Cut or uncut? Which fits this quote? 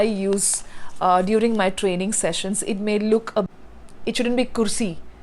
cut